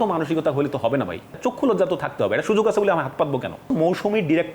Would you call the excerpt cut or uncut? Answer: cut